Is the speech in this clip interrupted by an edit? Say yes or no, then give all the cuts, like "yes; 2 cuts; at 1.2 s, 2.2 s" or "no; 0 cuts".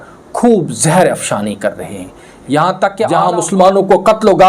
yes; 1 cut; at 3.1 s